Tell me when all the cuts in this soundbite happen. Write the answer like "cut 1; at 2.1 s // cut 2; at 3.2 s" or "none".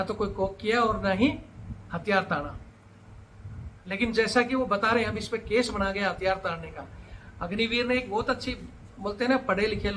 none